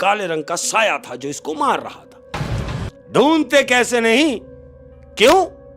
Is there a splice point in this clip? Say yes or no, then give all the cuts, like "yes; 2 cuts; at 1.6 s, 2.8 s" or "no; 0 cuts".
yes; 1 cut; at 2.9 s